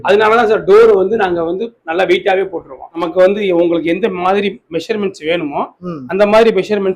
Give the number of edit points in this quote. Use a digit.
1